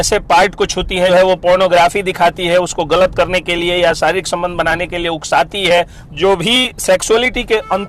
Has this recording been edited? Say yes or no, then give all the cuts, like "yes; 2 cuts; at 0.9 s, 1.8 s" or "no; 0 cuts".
yes; 2 cuts; at 1.1 s, 6.0 s